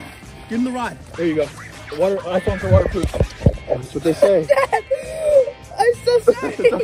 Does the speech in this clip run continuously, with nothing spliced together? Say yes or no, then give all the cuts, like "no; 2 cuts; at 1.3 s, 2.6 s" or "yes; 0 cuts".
yes; 0 cuts